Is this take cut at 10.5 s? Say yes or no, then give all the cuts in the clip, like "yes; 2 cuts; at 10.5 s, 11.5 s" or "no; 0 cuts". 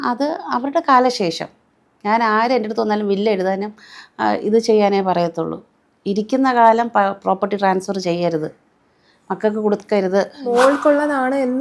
yes; 1 cut; at 10.5 s